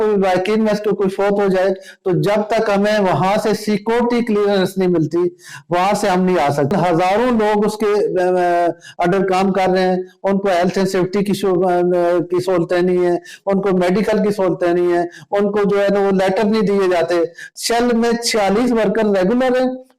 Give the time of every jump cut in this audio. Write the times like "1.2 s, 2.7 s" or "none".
6.7 s, 17.5 s